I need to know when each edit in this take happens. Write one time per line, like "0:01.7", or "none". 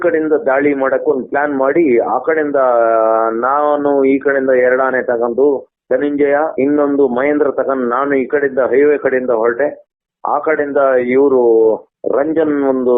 0:05.7